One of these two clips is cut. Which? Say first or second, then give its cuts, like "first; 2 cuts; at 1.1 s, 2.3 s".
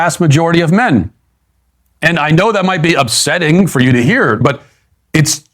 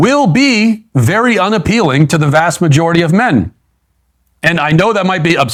first; 1 cut; at 4.4 s